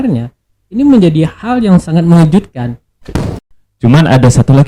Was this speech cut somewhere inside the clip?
yes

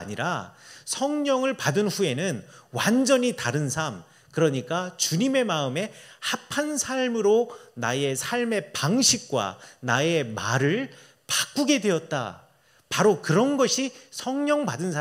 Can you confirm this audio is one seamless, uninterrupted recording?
yes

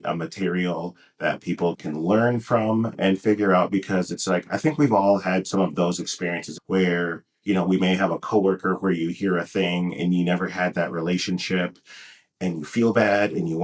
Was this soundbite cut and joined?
yes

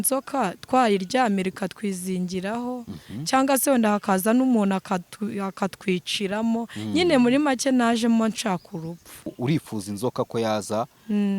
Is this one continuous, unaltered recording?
no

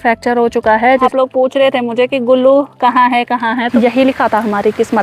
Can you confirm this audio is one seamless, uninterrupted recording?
no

